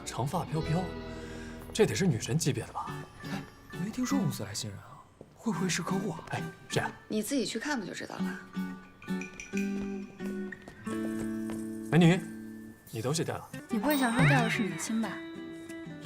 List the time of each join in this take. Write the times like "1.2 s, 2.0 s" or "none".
13.5 s